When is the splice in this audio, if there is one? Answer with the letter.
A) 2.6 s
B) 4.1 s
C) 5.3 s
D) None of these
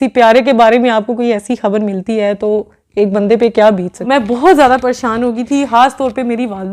B